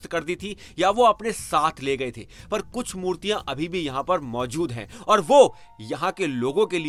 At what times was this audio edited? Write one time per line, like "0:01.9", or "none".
none